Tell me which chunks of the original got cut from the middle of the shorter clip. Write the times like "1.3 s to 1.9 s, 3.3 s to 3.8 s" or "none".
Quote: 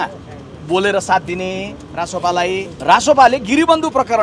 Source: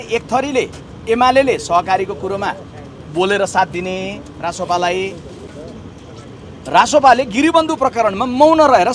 5.2 s to 6.6 s